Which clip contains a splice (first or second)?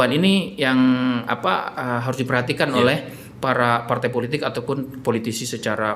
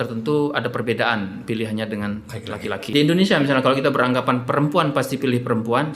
second